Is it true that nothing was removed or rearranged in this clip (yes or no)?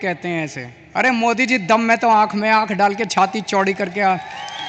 yes